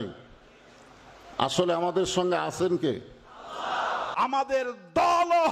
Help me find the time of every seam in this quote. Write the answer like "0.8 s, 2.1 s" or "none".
4.0 s

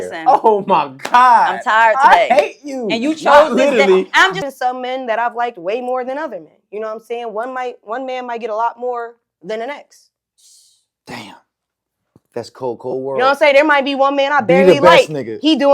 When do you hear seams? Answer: 4.3 s

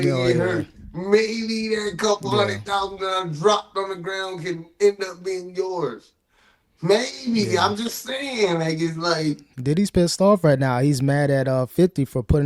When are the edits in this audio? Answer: 9.5 s

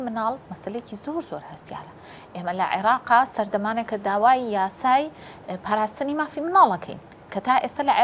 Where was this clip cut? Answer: none

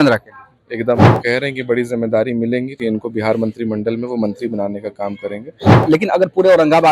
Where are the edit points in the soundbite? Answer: 1.2 s, 2.8 s, 5.8 s

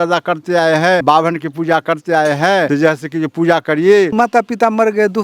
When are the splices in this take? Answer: 1.0 s, 2.7 s, 4.1 s

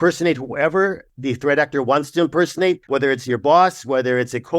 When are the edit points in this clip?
1.1 s, 2.8 s

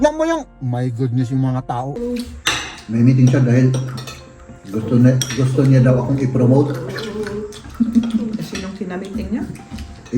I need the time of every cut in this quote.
1.9 s

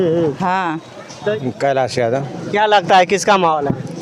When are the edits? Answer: 1.3 s

